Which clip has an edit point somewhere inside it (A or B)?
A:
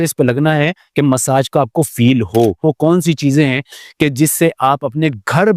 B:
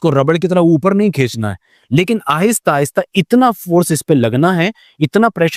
A